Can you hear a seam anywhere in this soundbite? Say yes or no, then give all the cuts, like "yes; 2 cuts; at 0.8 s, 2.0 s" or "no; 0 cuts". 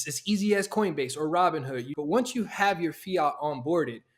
yes; 1 cut; at 1.9 s